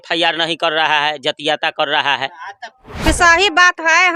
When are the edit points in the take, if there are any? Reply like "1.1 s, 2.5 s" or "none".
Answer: 3.1 s